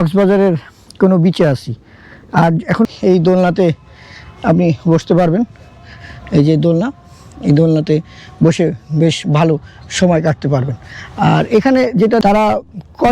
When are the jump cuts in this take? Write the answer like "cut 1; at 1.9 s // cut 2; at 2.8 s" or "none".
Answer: cut 1; at 2.9 s // cut 2; at 12.2 s